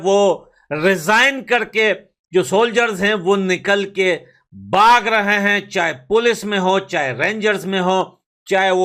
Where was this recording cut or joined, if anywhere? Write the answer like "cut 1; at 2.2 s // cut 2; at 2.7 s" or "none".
none